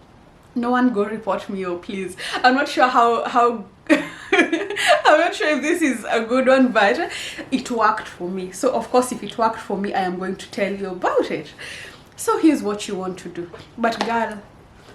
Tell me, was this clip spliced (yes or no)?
yes